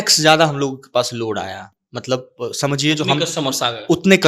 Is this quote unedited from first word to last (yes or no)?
yes